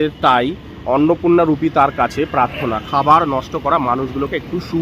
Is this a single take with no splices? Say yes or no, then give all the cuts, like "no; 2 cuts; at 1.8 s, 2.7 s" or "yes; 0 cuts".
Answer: yes; 0 cuts